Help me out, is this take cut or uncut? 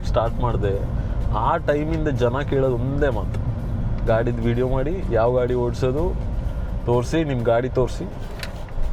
uncut